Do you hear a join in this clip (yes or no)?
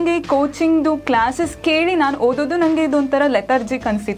no